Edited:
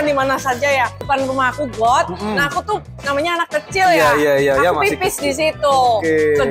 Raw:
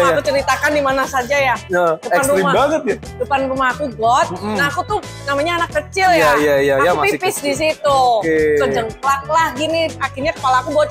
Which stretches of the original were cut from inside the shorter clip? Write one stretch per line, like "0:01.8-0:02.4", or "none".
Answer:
0:01.6-0:03.2